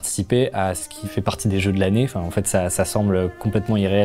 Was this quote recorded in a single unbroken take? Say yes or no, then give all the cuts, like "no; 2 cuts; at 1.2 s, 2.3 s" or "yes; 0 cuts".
no; 1 cut; at 0.9 s